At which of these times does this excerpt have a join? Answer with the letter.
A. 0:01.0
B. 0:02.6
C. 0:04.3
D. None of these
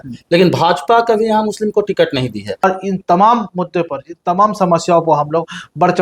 B